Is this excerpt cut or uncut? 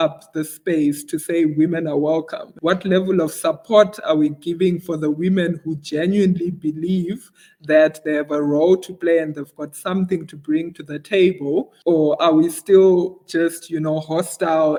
uncut